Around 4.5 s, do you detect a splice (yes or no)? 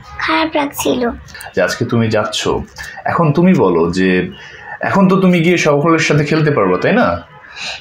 no